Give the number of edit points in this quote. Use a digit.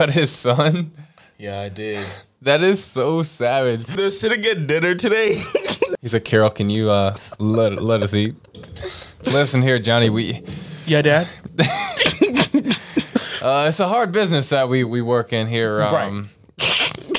3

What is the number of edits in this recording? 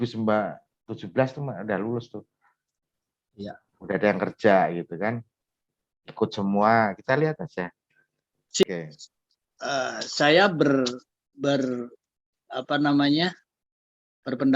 1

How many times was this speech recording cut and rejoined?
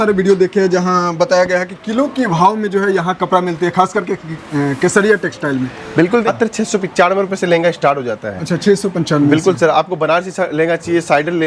1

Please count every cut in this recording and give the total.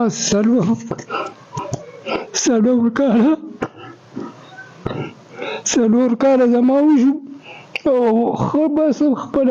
1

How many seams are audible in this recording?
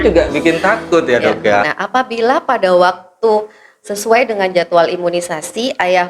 1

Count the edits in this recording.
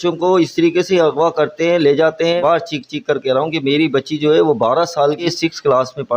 2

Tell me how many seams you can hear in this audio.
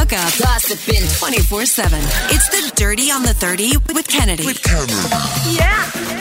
0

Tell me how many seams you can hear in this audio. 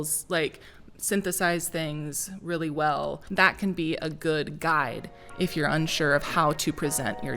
1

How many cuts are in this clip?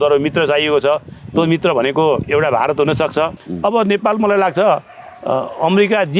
2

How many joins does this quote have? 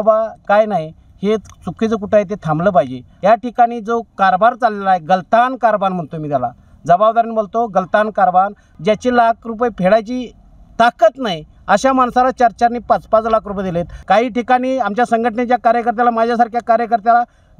3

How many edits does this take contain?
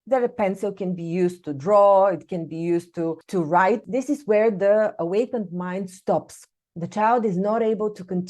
2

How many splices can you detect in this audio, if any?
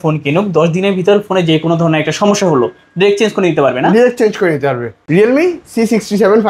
1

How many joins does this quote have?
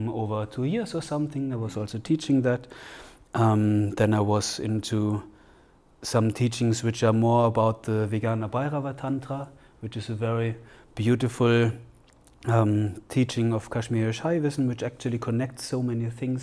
0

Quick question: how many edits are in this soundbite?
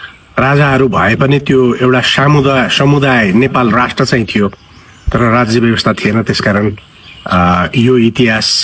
0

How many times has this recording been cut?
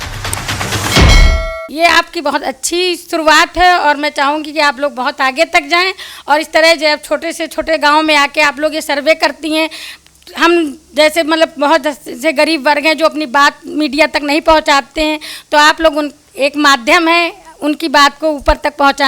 1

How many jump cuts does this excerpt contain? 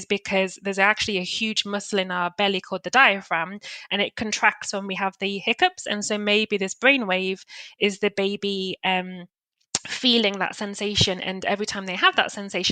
0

